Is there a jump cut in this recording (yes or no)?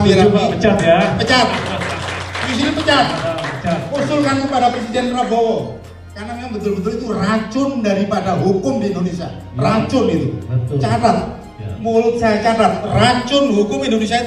no